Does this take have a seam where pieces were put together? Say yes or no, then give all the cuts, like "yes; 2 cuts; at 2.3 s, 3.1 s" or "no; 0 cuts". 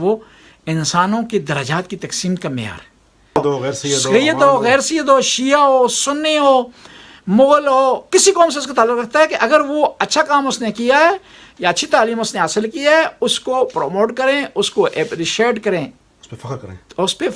yes; 1 cut; at 3.4 s